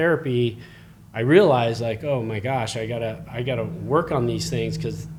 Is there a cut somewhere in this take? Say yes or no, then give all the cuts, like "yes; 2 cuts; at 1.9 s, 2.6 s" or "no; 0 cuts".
no; 0 cuts